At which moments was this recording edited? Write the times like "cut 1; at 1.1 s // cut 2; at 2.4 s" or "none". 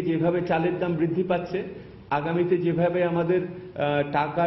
none